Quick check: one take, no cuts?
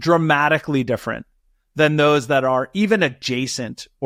yes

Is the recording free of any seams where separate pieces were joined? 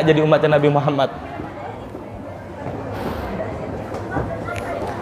yes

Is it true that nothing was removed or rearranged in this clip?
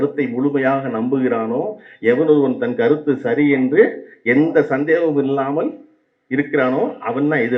yes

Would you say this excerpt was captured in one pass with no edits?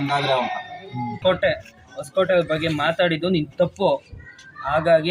no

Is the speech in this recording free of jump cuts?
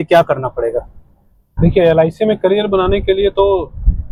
yes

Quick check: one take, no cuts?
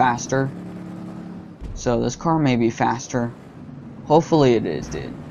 yes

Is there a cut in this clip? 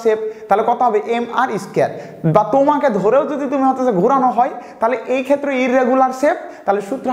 no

